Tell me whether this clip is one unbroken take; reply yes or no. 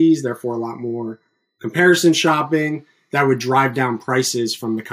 yes